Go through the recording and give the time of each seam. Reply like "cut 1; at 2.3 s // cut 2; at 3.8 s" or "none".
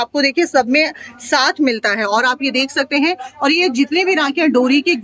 none

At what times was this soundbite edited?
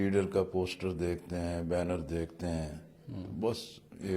none

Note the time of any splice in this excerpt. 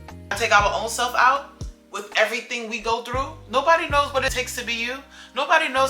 cut 1; at 4.3 s

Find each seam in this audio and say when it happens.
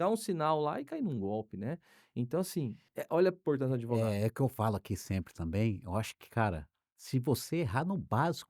cut 1; at 2.9 s

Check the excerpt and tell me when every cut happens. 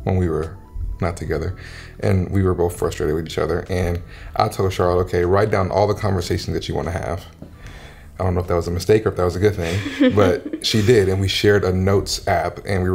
none

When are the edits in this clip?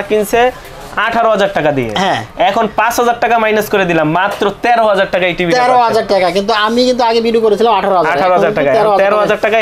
none

